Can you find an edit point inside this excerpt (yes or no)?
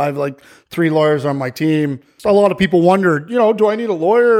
yes